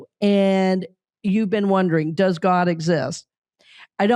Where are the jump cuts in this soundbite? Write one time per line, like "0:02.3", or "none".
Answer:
none